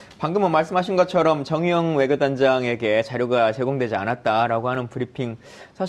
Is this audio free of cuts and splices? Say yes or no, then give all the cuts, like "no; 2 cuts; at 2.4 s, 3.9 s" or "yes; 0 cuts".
no; 1 cut; at 3.4 s